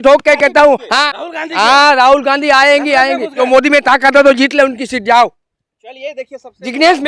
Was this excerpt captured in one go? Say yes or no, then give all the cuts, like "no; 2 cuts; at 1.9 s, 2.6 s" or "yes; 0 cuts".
no; 2 cuts; at 1.2 s, 3.3 s